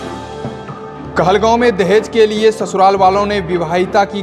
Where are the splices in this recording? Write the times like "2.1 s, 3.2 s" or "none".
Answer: 0.9 s